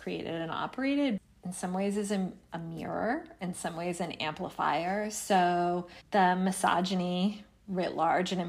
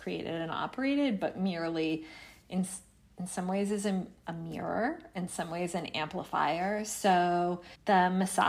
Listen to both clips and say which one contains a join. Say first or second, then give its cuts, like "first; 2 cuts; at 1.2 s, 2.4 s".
first; 1 cut; at 1.2 s